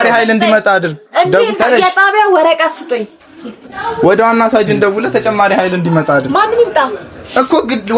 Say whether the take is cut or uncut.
uncut